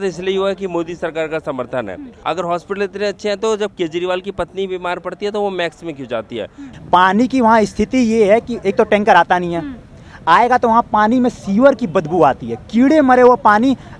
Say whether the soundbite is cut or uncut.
cut